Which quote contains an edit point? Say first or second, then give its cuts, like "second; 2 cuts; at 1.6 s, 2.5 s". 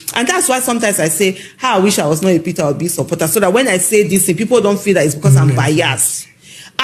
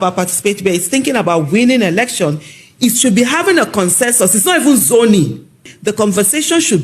second; 1 cut; at 5.8 s